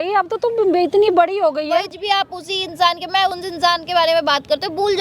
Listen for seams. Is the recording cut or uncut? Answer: cut